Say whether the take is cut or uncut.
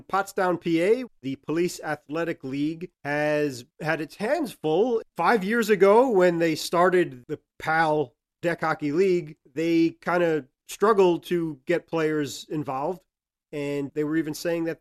cut